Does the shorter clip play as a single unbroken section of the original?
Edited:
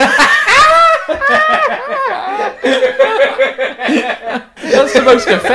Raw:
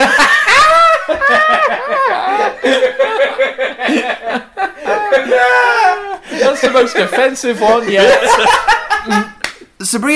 no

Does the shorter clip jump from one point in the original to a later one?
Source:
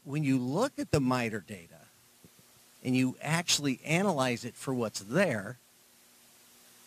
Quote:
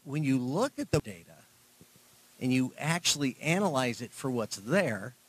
yes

